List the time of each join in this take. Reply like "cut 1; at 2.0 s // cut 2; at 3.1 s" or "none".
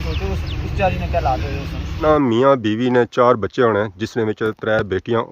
cut 1; at 1.9 s